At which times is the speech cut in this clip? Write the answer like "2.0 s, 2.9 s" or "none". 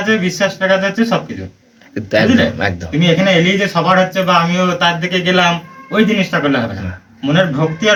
none